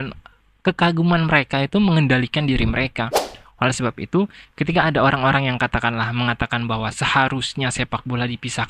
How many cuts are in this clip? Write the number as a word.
one